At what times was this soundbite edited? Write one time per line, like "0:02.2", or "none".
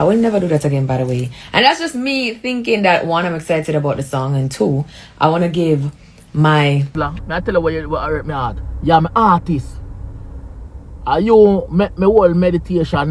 0:06.9